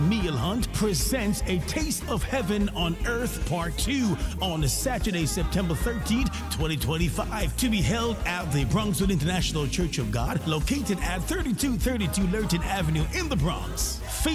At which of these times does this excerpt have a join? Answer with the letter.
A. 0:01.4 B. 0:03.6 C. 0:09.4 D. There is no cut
D